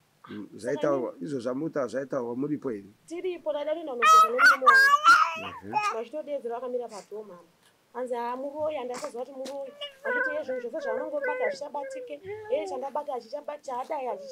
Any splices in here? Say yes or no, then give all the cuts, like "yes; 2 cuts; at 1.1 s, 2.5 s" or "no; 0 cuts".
no; 0 cuts